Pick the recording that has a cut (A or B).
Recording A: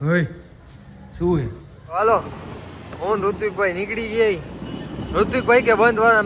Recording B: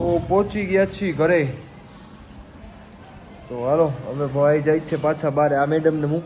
A